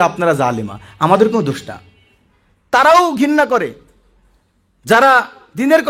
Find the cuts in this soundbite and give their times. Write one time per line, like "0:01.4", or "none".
0:02.5